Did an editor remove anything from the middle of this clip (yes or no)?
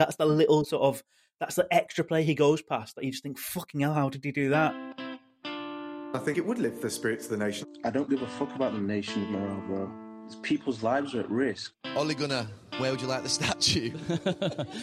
yes